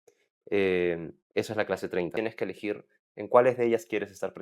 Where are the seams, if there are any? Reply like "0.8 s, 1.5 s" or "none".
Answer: 2.1 s